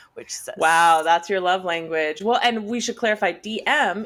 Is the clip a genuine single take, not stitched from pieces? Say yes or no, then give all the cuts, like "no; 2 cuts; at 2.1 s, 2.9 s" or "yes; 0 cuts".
yes; 0 cuts